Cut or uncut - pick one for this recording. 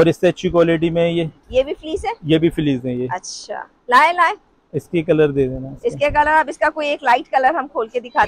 uncut